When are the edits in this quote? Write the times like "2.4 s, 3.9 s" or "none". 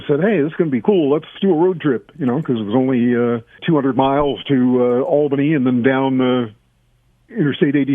1.3 s, 3.6 s